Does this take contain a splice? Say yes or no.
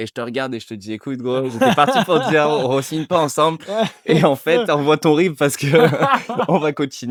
no